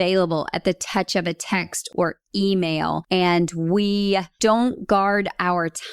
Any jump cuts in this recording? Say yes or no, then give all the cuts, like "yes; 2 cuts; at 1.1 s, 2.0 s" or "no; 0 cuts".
yes; 3 cuts; at 1.9 s, 3.0 s, 4.3 s